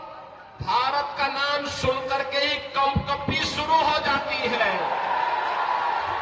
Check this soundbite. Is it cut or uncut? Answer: uncut